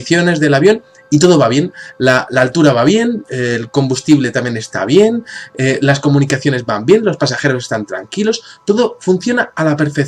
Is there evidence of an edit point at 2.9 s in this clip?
yes; 1 cut; at 2.9 s

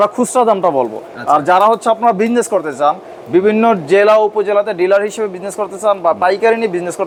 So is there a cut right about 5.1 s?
no; 0 cuts

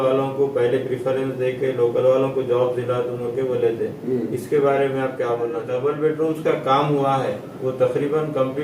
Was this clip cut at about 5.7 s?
yes; 1 cut; at 5.7 s

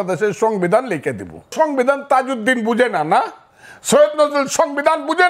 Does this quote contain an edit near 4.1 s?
no; 1 cut; at 1.5 s

